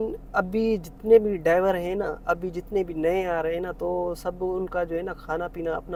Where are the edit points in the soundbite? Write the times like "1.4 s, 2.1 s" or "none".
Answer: none